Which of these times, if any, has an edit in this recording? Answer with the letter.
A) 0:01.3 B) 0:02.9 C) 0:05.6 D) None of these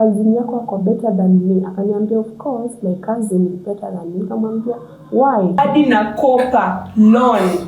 C